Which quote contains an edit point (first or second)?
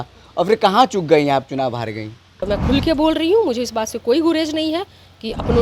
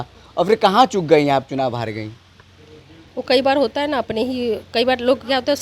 first